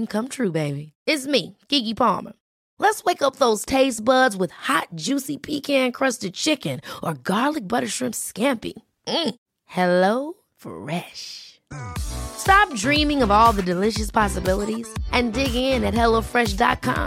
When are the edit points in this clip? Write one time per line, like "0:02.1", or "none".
none